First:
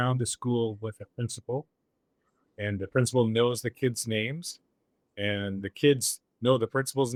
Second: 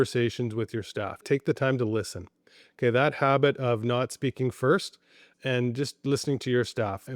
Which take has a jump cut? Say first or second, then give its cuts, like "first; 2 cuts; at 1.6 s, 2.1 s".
second; 1 cut; at 1.2 s